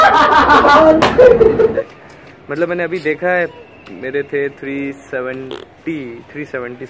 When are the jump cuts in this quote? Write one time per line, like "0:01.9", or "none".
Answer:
0:01.7